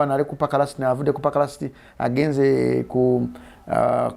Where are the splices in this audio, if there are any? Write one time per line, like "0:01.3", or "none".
none

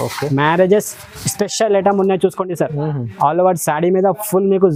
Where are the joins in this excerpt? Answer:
none

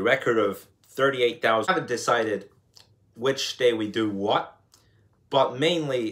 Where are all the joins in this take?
0:01.7

